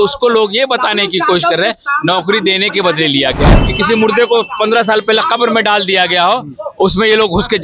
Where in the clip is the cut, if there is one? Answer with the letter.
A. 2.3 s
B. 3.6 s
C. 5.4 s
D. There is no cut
B